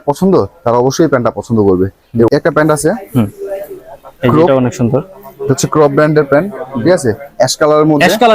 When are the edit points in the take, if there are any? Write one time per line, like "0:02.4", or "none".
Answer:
0:02.3